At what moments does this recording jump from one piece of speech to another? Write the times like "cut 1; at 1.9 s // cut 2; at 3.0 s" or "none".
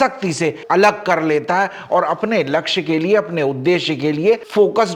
none